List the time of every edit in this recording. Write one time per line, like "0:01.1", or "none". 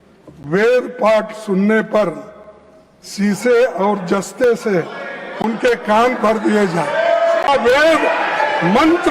0:07.5